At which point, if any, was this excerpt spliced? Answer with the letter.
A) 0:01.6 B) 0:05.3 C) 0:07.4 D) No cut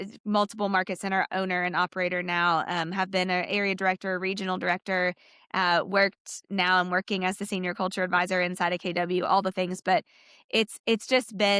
D